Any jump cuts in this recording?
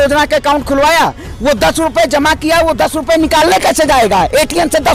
no; 0 cuts

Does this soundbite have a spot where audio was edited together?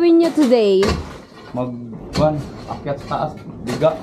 no; 0 cuts

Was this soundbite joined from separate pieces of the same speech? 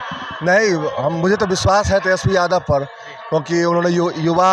no; 0 cuts

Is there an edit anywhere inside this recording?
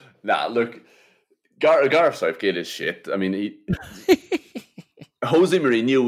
no; 0 cuts

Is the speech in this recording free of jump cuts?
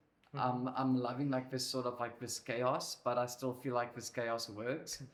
yes; 0 cuts

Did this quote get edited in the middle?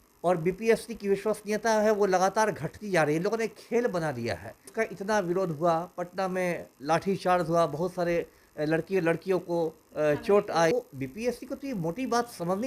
yes; 2 cuts; at 4.6 s, 10.7 s

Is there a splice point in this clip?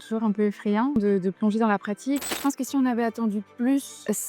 yes; 2 cuts; at 1.0 s, 2.4 s

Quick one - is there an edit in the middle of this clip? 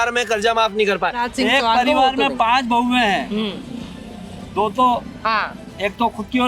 yes; 1 cut; at 1.2 s

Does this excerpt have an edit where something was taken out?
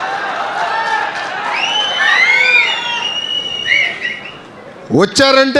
no; 0 cuts

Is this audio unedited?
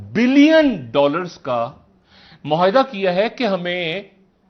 yes; 0 cuts

